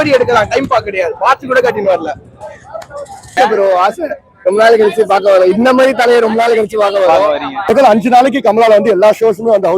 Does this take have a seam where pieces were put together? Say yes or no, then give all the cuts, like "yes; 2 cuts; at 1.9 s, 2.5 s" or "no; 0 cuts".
yes; 2 cuts; at 3.3 s, 7.6 s